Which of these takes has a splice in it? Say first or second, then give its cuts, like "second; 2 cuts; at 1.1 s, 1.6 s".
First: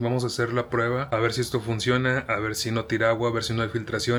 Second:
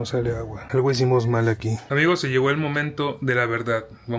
second; 1 cut; at 1.9 s